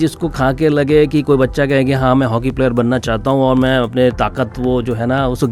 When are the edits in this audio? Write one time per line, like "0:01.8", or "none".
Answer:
none